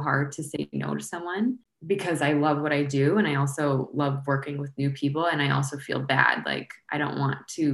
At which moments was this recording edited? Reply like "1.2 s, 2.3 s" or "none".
1.7 s